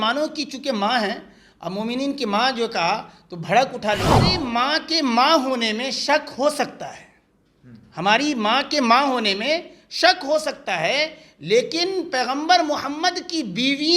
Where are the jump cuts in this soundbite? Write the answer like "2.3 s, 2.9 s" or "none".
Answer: 4.3 s